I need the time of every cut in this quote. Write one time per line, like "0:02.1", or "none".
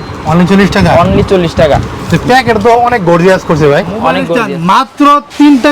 0:04.3